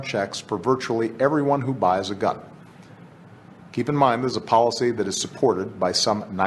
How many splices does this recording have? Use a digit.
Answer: 1